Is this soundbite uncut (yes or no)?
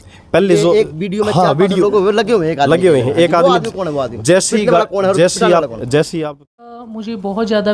no